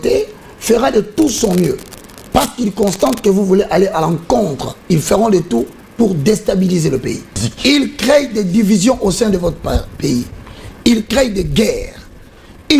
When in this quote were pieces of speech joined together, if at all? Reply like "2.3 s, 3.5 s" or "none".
7.5 s